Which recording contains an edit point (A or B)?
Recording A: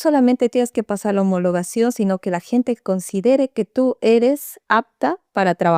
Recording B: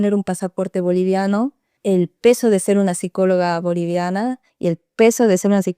B